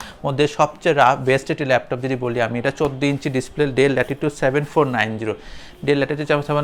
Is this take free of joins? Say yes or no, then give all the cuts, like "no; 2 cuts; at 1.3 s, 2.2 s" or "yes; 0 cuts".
yes; 0 cuts